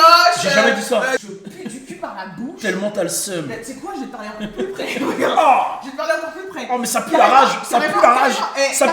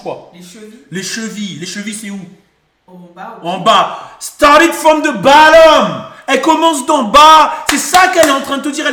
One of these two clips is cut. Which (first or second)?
first